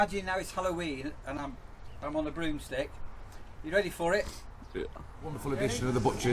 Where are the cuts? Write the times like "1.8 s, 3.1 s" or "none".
5.4 s